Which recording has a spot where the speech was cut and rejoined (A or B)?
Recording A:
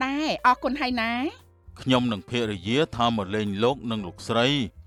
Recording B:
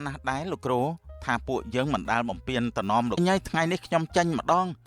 B